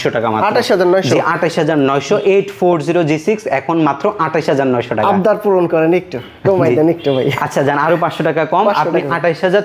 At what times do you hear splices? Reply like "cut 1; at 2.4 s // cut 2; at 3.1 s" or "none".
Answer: none